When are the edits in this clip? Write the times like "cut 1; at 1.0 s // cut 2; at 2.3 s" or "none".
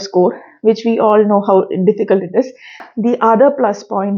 cut 1; at 2.7 s